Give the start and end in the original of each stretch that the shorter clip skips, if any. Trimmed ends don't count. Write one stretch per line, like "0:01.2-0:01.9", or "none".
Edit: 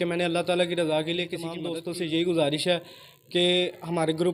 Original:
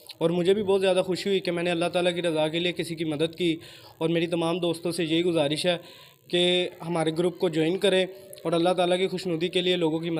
0:03.0-0:04.6

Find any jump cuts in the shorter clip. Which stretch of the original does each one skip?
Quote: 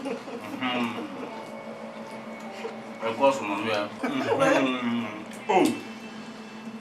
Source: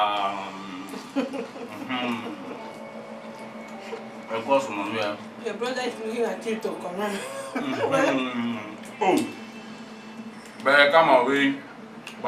0:05.2-0:07.5

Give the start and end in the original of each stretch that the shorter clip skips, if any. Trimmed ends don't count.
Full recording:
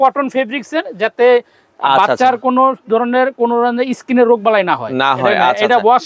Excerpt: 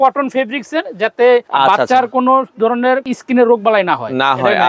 0:01.5-0:01.8
0:03.4-0:03.9

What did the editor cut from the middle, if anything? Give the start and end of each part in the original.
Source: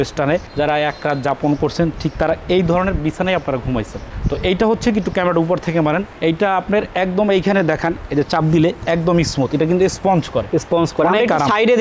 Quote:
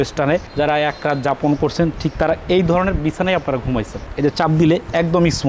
0:04.1-0:08.0

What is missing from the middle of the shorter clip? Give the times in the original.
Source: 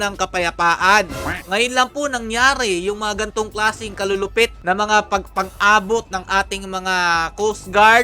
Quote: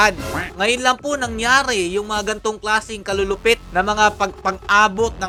none

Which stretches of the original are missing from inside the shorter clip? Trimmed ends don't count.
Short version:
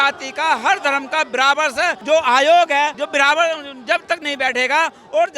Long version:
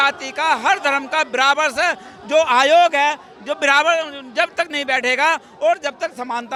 0:02.0-0:02.2
0:03.2-0:03.5

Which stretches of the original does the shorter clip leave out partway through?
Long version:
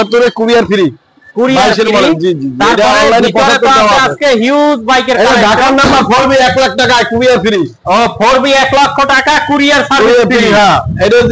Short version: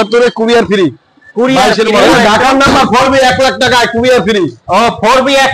0:02.1-0:05.2

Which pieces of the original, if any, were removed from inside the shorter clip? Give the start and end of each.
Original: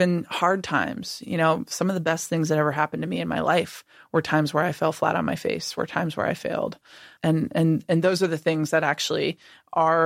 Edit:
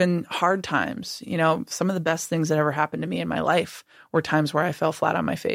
none

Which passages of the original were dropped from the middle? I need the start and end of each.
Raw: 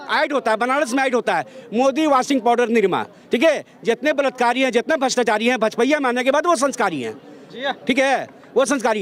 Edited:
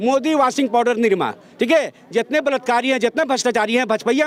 none

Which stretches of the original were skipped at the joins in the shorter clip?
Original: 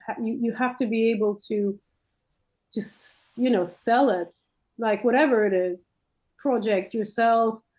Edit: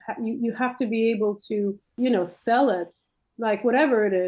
0:01.8-0:03.2

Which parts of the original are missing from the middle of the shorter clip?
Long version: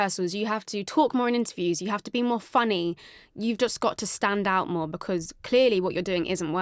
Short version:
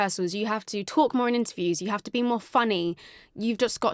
none

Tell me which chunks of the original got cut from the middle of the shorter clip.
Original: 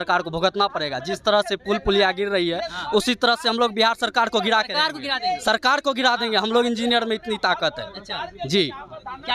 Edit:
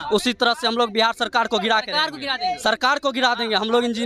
none

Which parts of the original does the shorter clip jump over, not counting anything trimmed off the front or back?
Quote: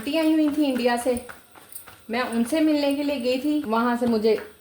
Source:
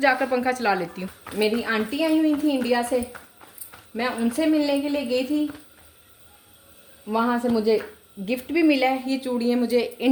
0:05.5-0:07.1

